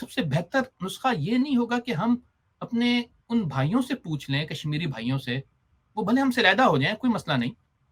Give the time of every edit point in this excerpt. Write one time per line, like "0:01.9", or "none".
none